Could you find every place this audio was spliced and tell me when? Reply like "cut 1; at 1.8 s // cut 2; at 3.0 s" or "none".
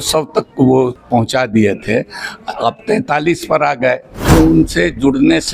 cut 1; at 1.0 s // cut 2; at 4.3 s